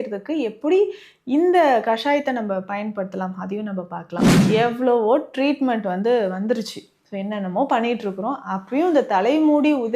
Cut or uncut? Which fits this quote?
cut